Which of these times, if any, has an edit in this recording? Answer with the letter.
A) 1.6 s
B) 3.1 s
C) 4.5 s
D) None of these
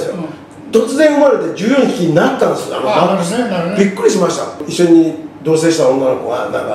C